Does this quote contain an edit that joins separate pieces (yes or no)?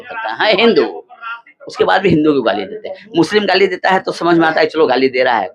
no